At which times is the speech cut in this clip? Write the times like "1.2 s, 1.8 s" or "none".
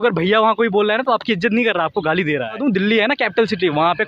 2.6 s